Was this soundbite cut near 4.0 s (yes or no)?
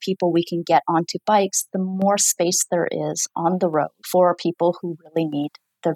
yes